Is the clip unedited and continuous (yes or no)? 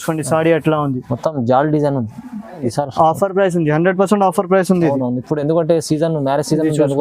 no